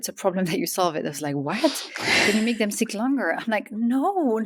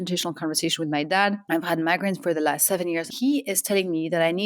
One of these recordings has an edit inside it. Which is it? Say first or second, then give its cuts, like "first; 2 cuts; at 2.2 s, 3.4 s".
second; 2 cuts; at 1.4 s, 3.1 s